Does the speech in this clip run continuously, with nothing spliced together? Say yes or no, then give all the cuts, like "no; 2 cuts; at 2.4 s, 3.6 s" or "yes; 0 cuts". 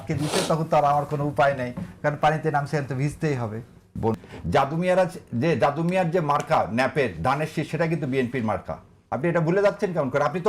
no; 1 cut; at 4.2 s